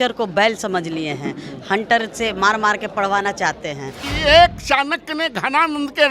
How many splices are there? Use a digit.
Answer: 1